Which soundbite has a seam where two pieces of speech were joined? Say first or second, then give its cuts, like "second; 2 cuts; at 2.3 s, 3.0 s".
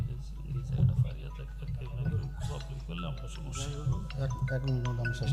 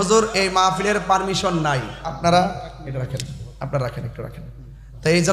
second; 1 cut; at 2.1 s